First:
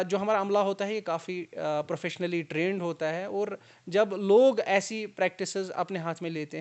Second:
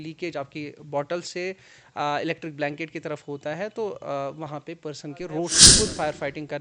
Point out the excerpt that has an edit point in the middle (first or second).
second